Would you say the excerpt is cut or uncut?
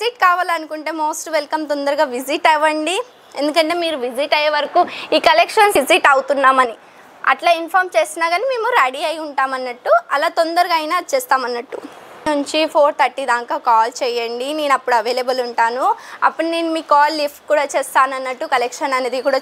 cut